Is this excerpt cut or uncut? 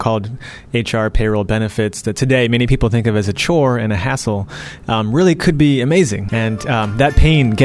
cut